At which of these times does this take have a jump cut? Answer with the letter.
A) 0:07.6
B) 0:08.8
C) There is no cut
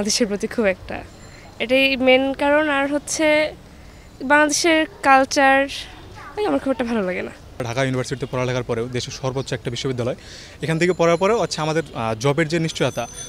C